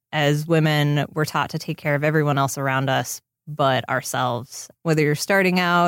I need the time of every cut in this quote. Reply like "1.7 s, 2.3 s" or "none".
4.7 s